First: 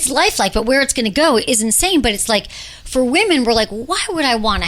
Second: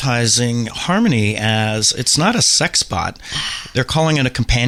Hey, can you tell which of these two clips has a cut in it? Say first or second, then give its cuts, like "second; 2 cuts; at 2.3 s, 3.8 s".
first; 1 cut; at 1.4 s